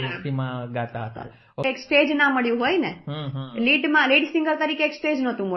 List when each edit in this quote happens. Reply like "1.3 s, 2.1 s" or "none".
1.7 s